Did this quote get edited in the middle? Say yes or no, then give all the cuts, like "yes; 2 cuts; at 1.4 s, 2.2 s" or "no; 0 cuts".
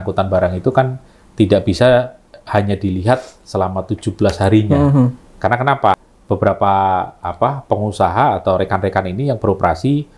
yes; 1 cut; at 6.1 s